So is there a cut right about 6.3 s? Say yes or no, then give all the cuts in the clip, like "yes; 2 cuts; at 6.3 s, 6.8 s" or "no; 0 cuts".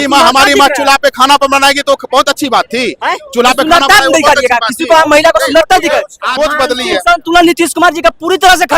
yes; 1 cut; at 6.3 s